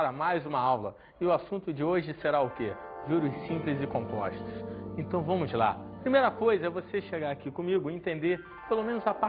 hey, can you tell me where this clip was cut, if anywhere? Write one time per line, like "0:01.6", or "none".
none